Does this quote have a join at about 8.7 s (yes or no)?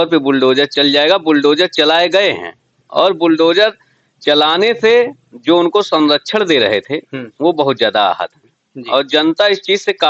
no